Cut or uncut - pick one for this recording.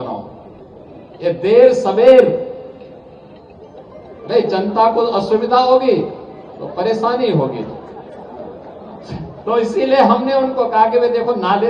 uncut